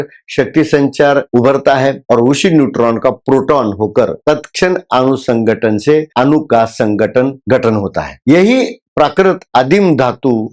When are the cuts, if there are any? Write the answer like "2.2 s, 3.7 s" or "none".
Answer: none